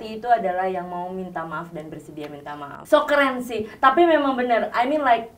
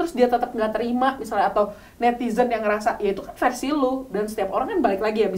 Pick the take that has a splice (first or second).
first